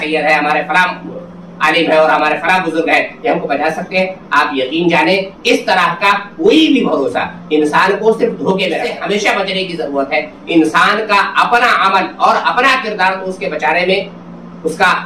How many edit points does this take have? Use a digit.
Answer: 1